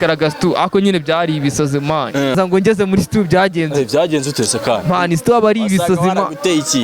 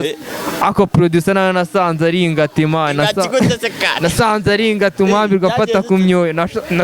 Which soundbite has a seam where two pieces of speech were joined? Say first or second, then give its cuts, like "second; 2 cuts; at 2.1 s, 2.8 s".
first; 1 cut; at 2.4 s